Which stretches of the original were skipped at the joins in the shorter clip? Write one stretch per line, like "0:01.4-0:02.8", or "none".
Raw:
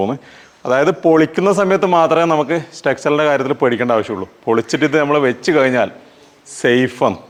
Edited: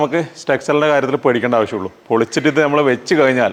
none